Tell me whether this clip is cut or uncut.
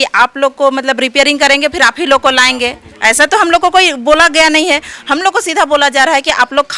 uncut